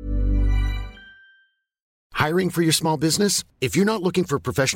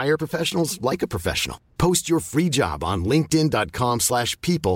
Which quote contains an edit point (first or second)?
first